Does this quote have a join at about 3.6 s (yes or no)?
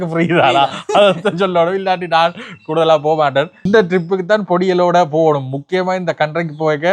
yes